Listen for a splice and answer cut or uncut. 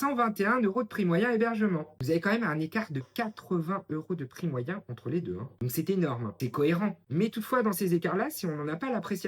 cut